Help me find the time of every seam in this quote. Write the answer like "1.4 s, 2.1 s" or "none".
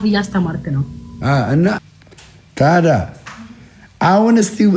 1.8 s